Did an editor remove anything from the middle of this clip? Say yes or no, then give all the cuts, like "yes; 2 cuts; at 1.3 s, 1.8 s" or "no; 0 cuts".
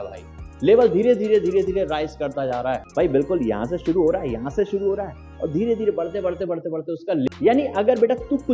yes; 2 cuts; at 2.8 s, 7.3 s